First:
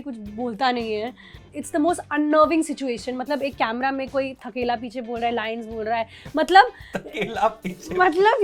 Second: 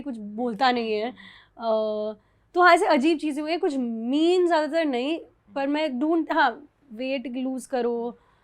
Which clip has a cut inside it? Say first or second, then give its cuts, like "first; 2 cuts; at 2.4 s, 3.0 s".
first; 1 cut; at 1.5 s